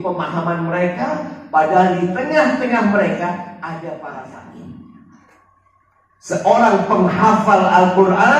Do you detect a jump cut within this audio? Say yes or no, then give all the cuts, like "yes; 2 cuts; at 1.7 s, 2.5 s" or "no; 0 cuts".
yes; 1 cut; at 4.1 s